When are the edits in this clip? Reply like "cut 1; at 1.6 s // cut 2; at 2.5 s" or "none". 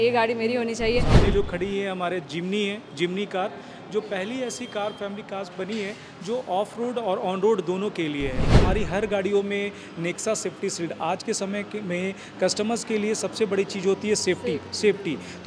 cut 1; at 1.1 s // cut 2; at 8.5 s